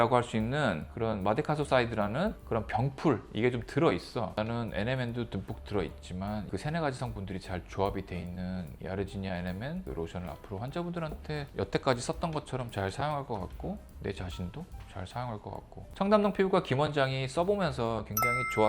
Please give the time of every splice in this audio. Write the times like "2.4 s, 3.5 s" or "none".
4.3 s, 15.8 s